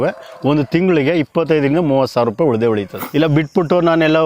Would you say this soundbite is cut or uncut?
cut